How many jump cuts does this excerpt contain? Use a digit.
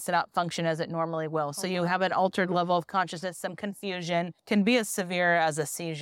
1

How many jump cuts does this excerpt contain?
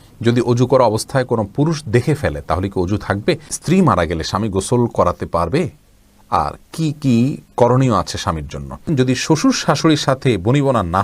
2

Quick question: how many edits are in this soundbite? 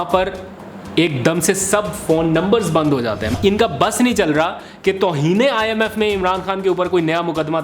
1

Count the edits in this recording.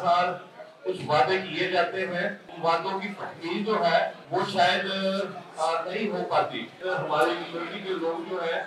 3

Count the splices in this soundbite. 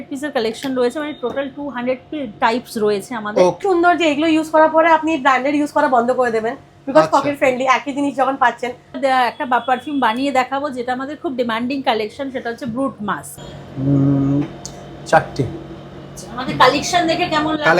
3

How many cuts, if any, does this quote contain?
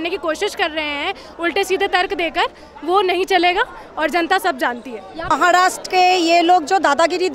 1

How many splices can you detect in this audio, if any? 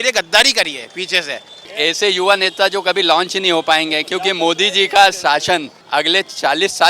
2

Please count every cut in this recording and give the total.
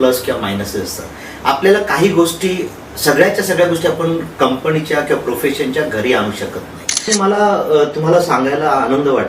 1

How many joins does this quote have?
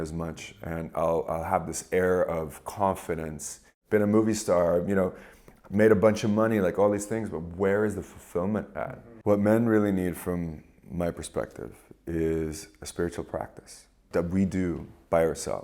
3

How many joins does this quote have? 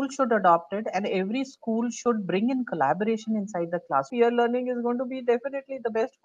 1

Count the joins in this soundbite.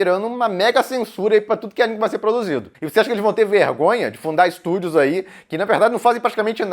1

